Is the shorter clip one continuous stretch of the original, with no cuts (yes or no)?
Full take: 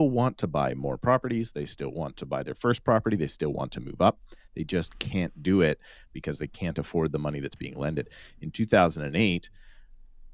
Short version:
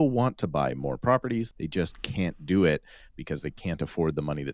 no